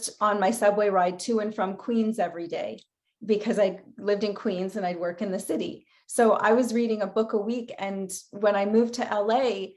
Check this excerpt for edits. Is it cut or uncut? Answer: uncut